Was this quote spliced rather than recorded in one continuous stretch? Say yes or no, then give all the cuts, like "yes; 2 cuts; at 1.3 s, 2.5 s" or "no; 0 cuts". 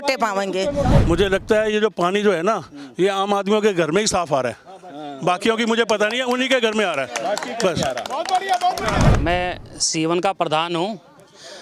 yes; 2 cuts; at 1.0 s, 9.1 s